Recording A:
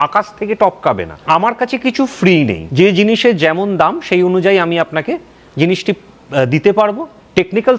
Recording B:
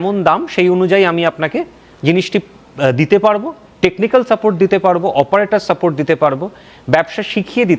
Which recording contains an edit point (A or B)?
A